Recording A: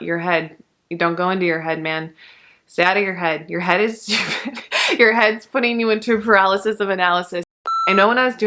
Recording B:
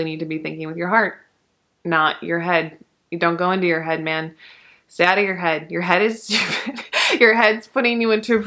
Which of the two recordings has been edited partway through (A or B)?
A